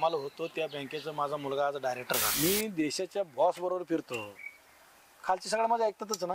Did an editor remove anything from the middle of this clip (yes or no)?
yes